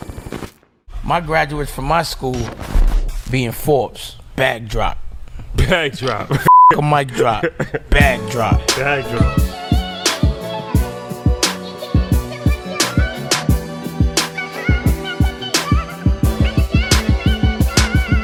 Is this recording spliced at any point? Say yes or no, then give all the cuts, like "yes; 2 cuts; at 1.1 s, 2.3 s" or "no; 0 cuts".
no; 0 cuts